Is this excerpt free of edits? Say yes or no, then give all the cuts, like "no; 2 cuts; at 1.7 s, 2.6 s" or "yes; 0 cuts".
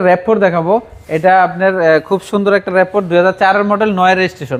yes; 0 cuts